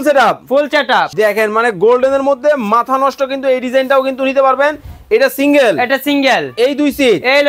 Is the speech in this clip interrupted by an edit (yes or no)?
yes